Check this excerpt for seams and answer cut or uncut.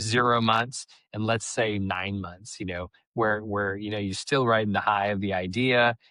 uncut